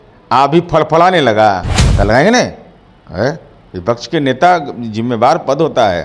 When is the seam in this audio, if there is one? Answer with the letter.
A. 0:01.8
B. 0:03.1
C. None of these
A